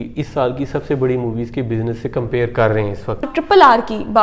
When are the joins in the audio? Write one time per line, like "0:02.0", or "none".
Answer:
0:03.3

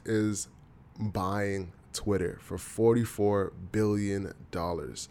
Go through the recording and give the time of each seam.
none

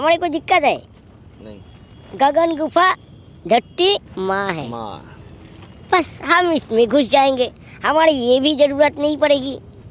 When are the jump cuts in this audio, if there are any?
0:04.1

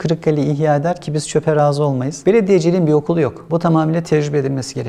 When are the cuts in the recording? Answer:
0:02.2

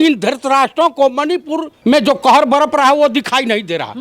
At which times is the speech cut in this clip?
0:01.7

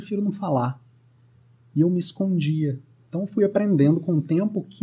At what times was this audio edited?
0:03.0

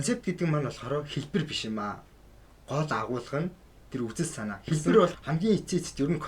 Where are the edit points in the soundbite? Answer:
0:05.2

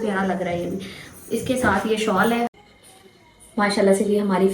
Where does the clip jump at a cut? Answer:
0:02.6

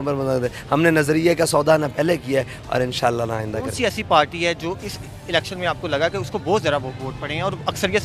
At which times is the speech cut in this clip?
none

